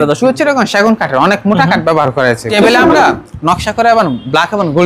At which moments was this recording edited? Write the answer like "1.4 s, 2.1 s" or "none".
2.5 s